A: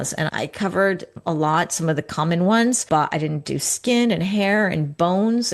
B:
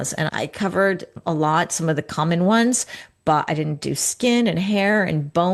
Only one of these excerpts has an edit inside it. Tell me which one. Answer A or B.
A